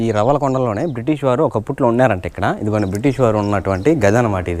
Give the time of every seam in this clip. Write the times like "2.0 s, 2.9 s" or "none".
none